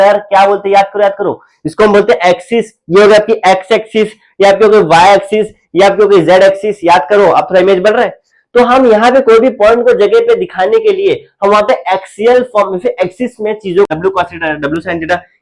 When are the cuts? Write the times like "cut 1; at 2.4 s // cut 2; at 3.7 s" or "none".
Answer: cut 1; at 13.9 s